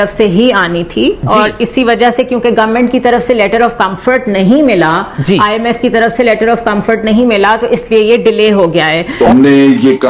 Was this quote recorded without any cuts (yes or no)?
yes